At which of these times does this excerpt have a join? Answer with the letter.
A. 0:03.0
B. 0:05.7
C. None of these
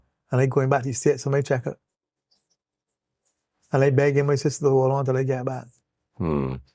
C